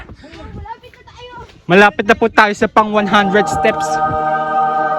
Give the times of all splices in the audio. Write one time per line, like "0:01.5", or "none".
0:03.6